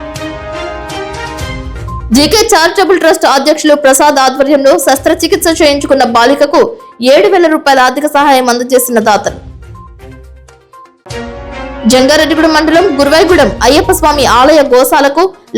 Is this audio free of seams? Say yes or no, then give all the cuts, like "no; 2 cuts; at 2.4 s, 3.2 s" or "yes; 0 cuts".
no; 1 cut; at 1.6 s